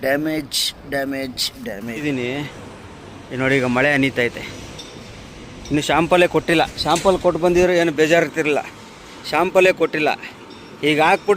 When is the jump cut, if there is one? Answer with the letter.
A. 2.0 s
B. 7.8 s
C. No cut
A